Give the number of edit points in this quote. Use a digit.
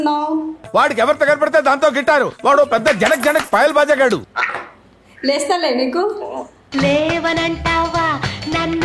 0